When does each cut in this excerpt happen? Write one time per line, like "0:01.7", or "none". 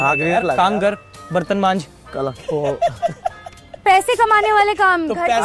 none